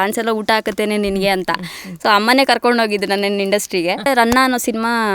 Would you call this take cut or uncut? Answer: cut